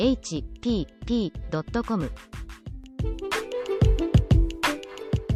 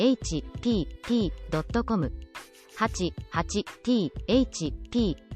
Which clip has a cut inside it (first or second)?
second